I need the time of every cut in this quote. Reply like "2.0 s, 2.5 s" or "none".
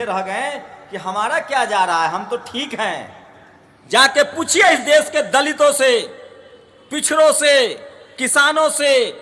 none